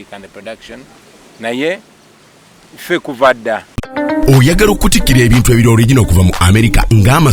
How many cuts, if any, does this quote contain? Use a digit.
1